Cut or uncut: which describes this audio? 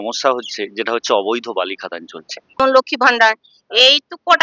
cut